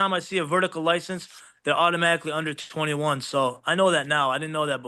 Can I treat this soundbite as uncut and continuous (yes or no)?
yes